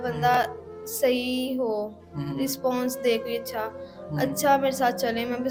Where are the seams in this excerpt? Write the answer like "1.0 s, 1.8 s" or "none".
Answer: none

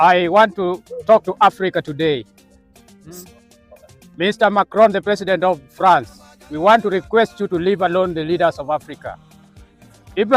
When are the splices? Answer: none

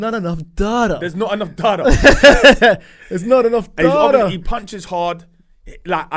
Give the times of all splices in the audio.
none

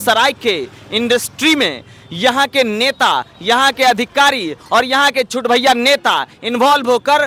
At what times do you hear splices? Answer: none

